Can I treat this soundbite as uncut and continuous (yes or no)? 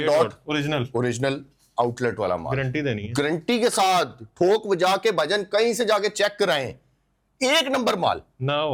yes